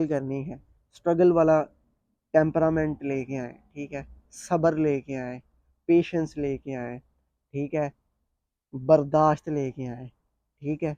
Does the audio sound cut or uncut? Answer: uncut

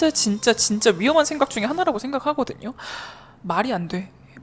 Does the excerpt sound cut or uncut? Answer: uncut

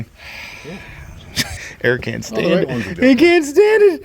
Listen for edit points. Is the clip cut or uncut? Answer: cut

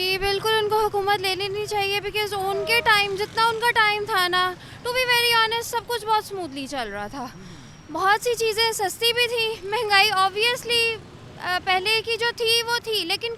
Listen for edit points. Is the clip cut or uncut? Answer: uncut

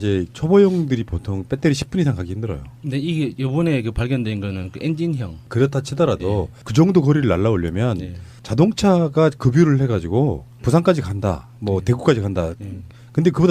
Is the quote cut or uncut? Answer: cut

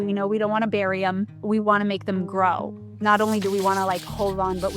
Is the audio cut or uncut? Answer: cut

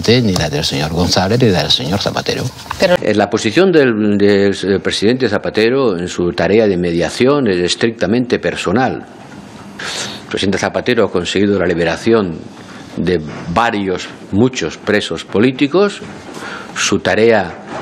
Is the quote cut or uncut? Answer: cut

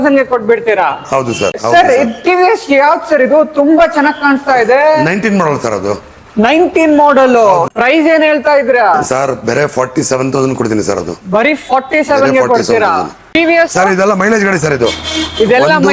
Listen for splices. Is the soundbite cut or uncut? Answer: cut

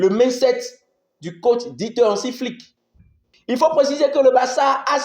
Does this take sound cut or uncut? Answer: cut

